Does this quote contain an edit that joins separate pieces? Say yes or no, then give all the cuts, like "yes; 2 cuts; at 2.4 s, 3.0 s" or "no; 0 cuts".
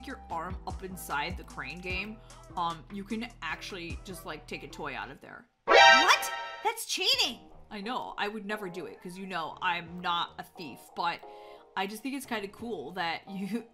no; 0 cuts